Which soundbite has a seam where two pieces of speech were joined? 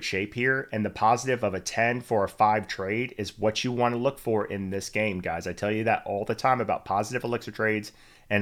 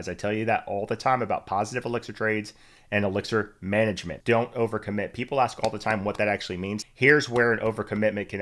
second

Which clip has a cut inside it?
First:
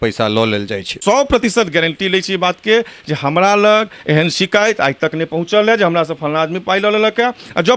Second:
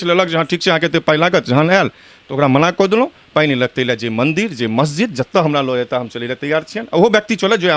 first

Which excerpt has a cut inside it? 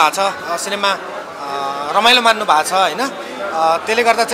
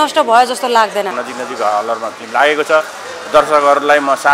second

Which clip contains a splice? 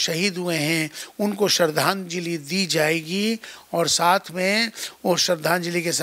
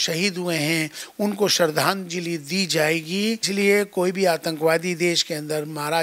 second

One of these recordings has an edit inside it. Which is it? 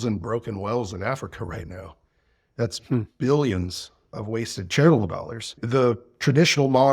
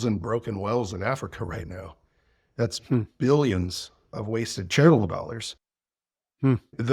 first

